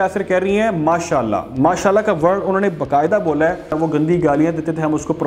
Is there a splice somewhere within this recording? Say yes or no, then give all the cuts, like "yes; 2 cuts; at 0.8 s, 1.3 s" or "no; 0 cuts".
yes; 1 cut; at 3.8 s